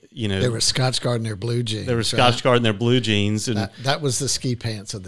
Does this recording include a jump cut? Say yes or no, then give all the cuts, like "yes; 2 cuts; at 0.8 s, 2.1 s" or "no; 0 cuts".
no; 0 cuts